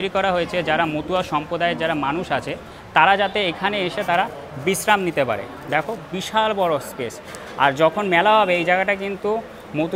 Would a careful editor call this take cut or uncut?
uncut